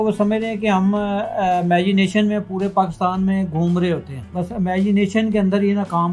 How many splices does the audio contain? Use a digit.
1